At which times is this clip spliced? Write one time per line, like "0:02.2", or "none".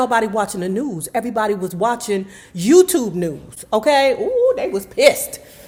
none